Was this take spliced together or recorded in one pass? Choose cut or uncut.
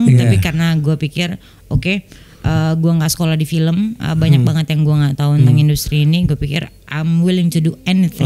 uncut